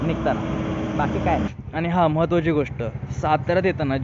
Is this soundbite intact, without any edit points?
no; 1 cut; at 1.6 s

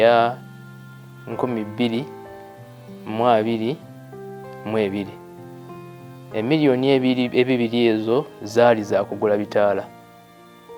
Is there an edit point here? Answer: yes; 1 cut; at 9.9 s

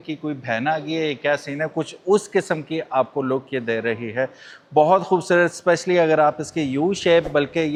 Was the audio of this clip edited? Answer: no; 0 cuts

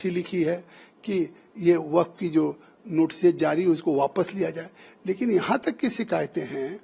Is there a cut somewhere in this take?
no; 0 cuts

